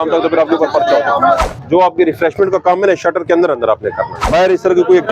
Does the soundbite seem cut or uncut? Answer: cut